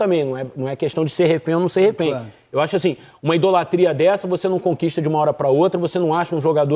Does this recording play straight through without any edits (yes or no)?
yes